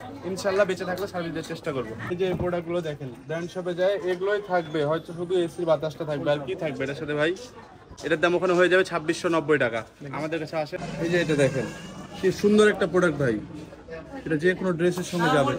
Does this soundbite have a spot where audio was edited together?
yes; 2 cuts; at 2.0 s, 10.7 s

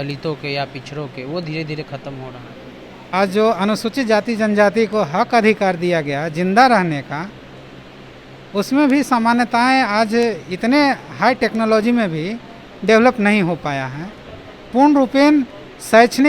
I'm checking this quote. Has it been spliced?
yes; 1 cut; at 3.0 s

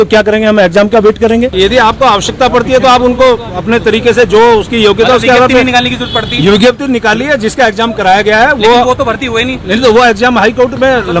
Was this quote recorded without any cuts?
no; 1 cut; at 1.5 s

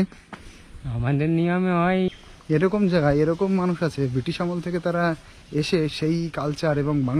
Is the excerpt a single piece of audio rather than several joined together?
no; 1 cut; at 2.3 s

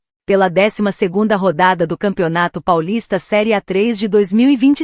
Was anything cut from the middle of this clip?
no; 0 cuts

